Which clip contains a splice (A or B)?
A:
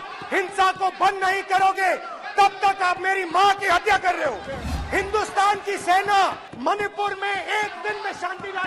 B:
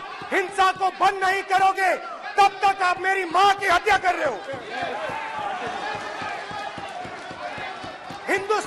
A